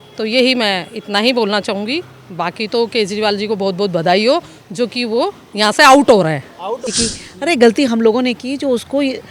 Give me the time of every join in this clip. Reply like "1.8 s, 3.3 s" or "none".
6.9 s